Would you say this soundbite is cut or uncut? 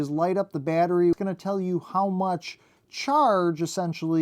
cut